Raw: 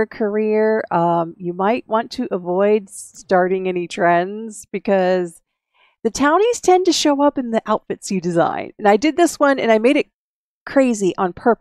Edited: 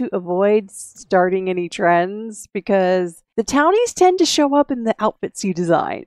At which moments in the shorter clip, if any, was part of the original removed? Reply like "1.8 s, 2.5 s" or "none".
3.2 s